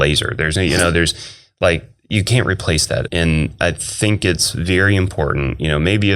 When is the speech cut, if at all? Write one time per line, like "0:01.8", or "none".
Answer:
0:03.1